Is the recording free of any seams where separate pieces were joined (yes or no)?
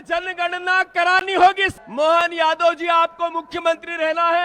no